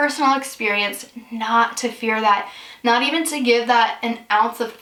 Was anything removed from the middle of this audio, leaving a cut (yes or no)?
no